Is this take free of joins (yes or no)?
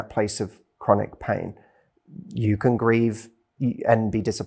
yes